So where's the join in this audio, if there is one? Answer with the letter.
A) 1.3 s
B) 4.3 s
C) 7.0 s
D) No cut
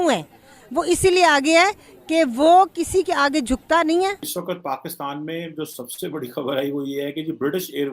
B